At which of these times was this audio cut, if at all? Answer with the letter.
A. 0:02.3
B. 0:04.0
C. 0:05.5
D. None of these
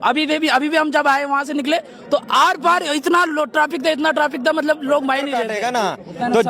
C